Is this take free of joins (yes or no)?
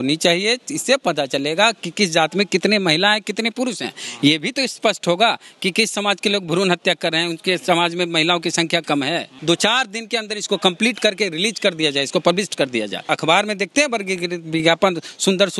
no